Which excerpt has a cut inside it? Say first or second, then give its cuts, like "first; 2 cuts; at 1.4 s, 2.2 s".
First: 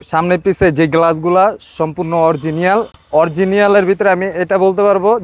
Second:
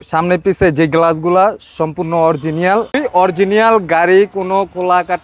second; 1 cut; at 3.0 s